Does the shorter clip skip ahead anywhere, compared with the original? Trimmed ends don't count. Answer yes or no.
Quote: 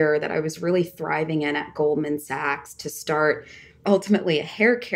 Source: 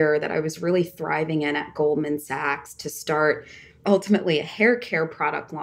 no